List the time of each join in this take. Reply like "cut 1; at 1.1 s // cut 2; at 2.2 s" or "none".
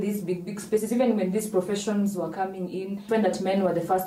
cut 1; at 3.0 s